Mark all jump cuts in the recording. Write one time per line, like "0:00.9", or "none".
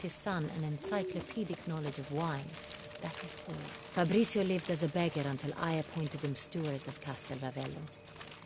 0:06.0